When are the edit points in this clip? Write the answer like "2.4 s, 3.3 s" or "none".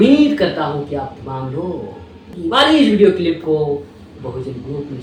none